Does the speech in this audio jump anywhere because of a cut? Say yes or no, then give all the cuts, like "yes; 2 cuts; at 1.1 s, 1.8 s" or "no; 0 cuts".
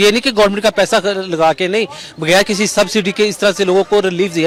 no; 0 cuts